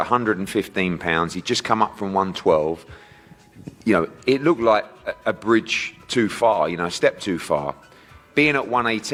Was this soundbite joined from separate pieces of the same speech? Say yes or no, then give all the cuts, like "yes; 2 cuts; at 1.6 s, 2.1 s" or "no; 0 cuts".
no; 0 cuts